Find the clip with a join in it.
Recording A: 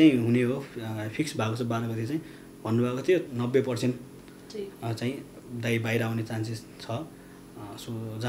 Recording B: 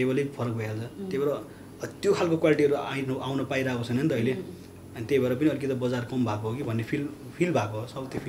A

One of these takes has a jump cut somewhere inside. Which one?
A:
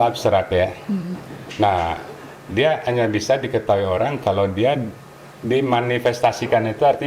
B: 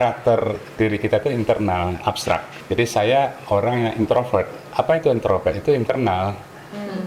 B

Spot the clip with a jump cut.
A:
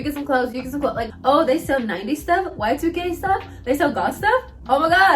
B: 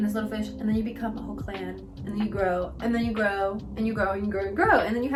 A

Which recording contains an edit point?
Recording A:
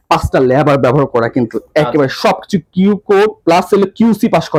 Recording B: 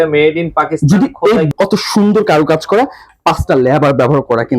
B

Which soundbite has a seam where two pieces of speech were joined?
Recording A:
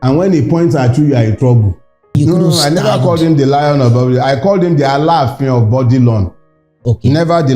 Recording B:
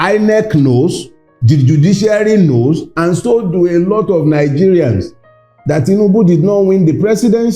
A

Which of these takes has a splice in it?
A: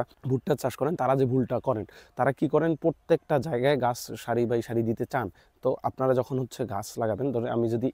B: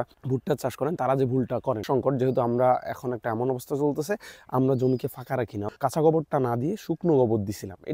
B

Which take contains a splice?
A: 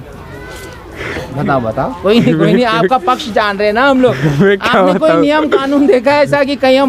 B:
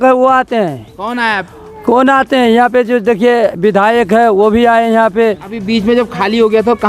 B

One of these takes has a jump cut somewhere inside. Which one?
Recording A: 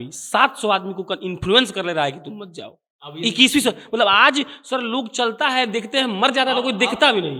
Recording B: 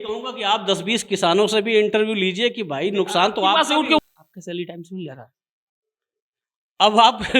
B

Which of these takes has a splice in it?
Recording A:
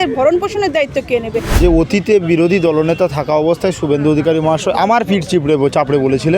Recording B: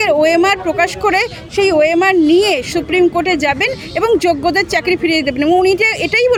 A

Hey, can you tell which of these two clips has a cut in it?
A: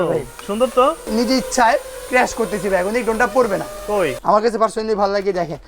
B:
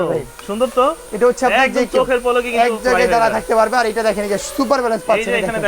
A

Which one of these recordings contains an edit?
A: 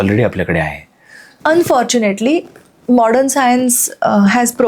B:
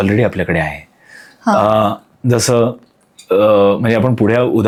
A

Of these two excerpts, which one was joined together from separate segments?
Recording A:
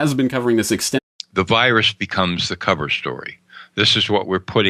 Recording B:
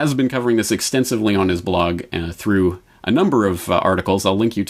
B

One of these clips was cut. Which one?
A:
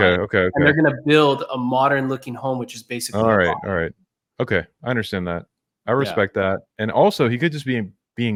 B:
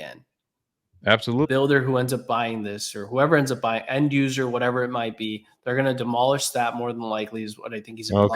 B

